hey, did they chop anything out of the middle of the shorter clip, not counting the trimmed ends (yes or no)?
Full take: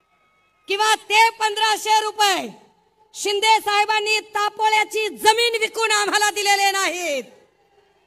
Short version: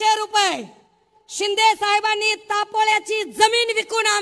no